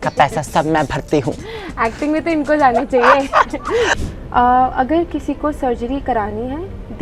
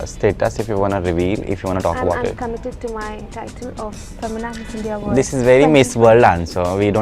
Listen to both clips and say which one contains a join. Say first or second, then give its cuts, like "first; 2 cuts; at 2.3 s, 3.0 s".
first; 1 cut; at 3.9 s